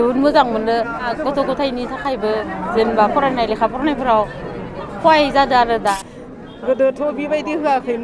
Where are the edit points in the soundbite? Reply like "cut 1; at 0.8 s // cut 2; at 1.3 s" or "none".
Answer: cut 1; at 1.1 s // cut 2; at 5.9 s